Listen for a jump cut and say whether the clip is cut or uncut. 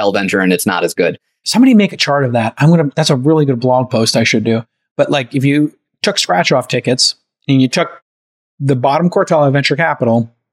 cut